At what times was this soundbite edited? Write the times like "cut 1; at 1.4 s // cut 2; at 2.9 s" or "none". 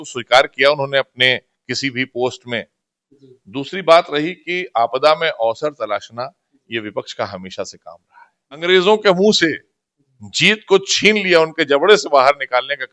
cut 1; at 8.6 s